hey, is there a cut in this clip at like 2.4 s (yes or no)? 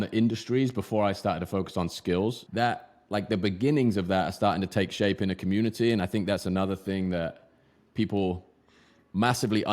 yes